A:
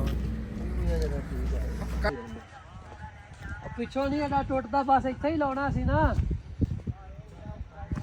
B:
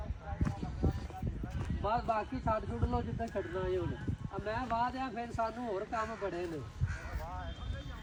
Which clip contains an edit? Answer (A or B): A